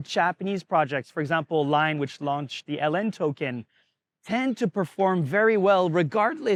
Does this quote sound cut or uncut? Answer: uncut